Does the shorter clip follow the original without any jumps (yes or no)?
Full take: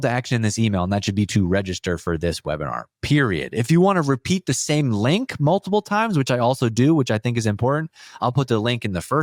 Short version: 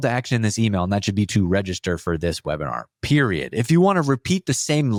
yes